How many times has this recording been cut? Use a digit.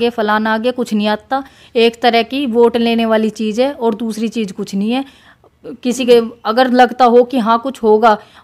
0